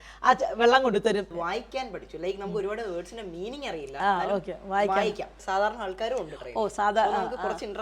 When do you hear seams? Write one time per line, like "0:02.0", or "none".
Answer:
0:01.3
0:05.4